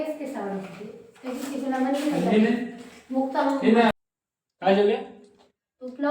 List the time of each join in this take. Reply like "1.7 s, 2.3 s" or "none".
3.9 s